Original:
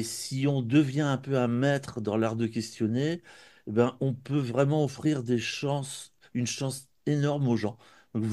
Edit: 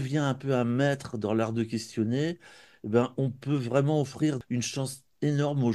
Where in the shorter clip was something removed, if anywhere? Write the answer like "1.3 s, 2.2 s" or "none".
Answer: 4.4 s